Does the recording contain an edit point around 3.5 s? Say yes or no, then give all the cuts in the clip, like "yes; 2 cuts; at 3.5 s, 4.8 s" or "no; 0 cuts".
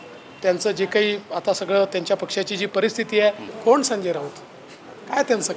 yes; 1 cut; at 3.5 s